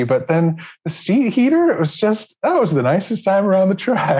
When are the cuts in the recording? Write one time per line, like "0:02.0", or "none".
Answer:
none